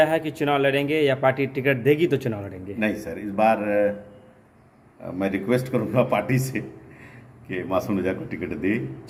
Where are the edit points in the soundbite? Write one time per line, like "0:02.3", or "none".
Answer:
none